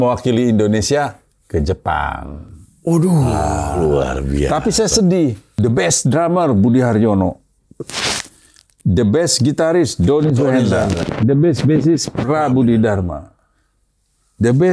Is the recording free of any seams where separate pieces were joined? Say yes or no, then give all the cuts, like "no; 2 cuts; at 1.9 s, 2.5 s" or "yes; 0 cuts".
no; 1 cut; at 5.5 s